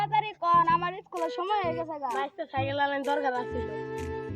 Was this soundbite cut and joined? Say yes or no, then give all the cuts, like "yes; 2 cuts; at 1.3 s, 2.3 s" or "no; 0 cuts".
yes; 1 cut; at 3.5 s